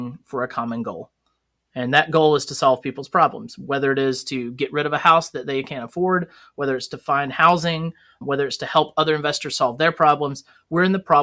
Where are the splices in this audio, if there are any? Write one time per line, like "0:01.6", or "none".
0:08.1